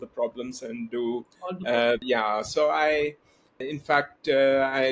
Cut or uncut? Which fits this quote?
uncut